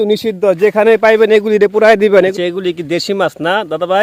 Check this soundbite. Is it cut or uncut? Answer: cut